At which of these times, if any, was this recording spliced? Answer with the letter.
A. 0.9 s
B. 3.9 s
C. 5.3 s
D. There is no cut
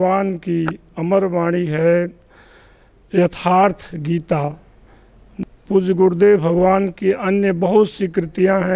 C